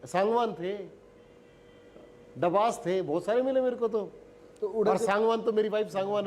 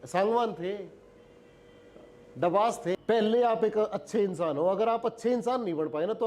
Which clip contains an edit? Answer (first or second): second